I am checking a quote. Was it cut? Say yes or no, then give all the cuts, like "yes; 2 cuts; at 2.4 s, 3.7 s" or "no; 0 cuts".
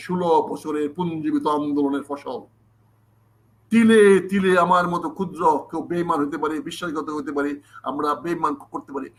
no; 0 cuts